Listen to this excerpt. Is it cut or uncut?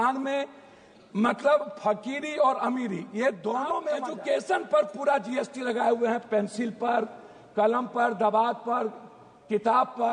cut